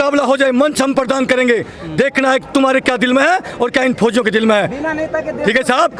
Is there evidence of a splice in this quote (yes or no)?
no